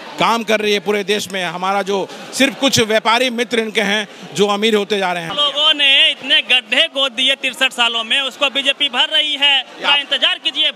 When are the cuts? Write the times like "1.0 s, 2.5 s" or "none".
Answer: 5.3 s